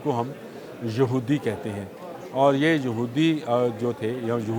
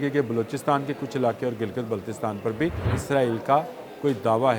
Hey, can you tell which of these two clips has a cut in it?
second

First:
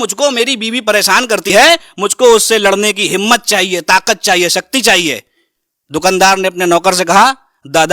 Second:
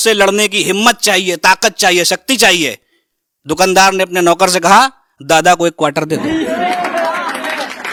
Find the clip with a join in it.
first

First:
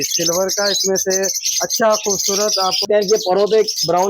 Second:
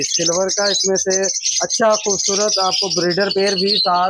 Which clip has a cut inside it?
first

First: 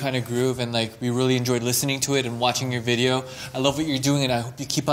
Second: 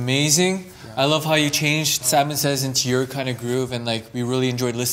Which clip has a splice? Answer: second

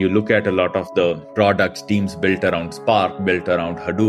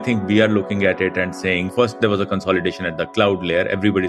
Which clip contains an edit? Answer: second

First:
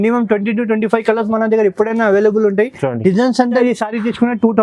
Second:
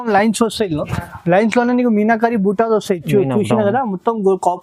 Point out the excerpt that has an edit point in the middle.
first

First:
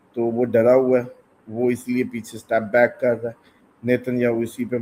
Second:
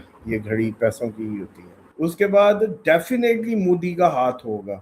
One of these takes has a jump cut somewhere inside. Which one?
second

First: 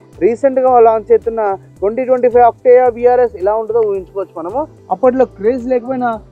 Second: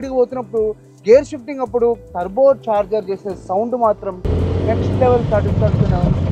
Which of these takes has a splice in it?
first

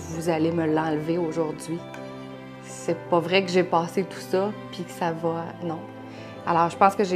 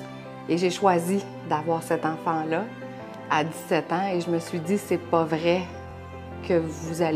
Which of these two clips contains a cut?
second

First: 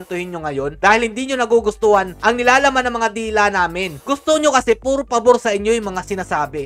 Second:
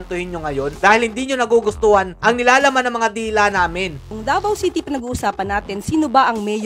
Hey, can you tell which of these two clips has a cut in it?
second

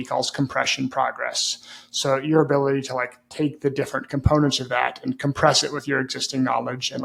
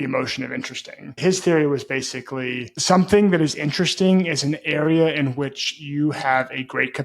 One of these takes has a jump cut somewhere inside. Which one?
second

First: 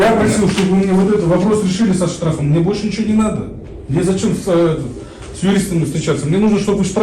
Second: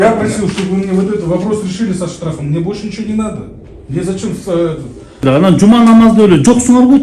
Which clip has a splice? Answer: second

